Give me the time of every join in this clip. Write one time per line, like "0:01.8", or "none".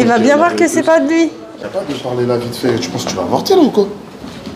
0:01.5